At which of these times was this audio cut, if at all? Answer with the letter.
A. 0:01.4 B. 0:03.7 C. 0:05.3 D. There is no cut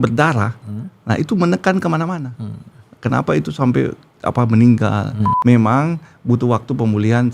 C